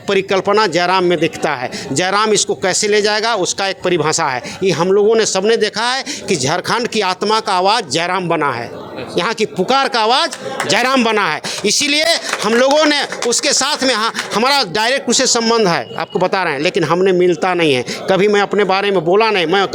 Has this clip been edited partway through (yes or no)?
no